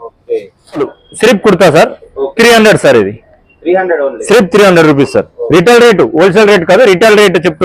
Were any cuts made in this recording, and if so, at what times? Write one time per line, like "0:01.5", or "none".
0:01.0